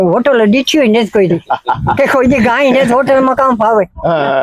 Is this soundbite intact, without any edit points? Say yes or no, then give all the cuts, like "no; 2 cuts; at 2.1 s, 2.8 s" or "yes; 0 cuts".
yes; 0 cuts